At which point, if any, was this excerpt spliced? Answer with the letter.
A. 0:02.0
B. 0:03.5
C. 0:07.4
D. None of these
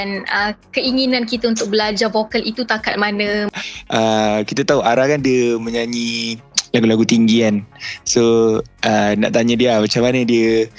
B